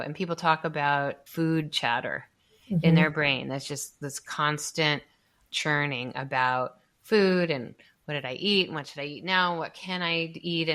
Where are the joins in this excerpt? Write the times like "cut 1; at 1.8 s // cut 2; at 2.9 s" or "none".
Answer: cut 1; at 1.2 s